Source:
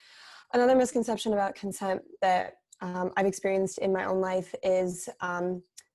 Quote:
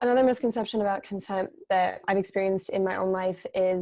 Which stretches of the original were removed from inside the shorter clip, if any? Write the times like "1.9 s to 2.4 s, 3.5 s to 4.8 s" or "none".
2.5 s to 3.1 s